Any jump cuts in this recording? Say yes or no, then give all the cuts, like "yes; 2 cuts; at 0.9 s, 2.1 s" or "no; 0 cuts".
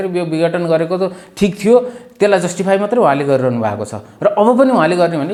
no; 0 cuts